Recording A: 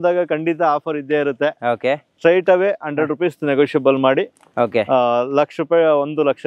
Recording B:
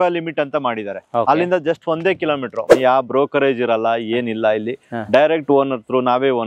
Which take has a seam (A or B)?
B